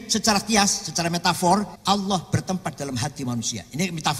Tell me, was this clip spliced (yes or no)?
yes